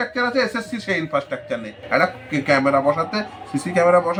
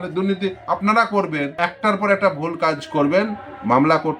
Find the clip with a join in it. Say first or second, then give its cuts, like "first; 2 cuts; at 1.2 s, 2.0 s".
second; 1 cut; at 1.5 s